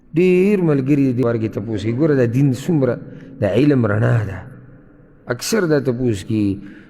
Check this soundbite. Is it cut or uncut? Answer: cut